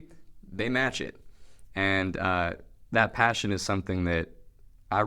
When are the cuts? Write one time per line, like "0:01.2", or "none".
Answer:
none